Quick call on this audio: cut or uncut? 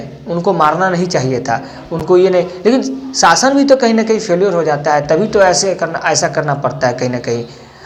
uncut